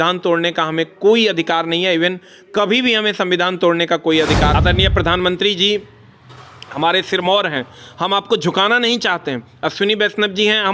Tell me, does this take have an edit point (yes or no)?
yes